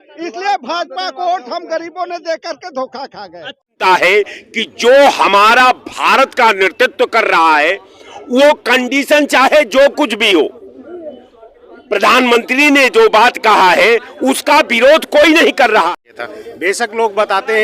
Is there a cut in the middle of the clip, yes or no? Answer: yes